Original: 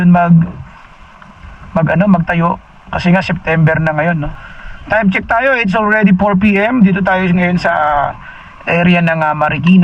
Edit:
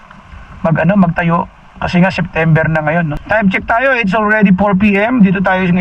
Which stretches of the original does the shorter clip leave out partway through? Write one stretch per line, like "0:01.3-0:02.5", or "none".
0:04.3-0:04.8